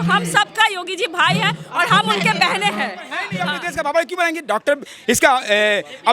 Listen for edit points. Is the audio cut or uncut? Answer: cut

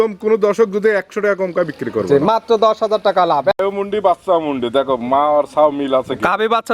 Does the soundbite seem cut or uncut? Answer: cut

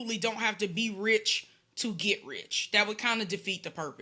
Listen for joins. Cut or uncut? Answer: uncut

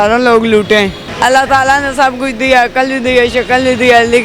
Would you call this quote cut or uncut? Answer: cut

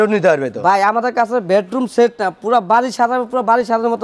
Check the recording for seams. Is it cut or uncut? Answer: uncut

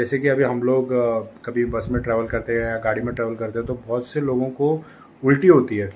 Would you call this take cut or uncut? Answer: uncut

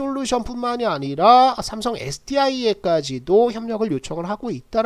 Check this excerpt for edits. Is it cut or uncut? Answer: uncut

